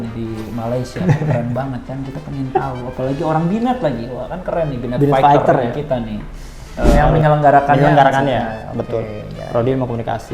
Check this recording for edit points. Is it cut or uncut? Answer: cut